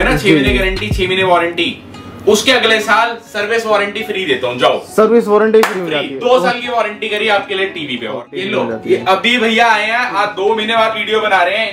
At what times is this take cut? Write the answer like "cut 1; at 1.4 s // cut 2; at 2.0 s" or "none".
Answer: cut 1; at 8.4 s